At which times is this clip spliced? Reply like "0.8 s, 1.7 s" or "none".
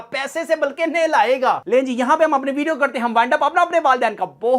1.6 s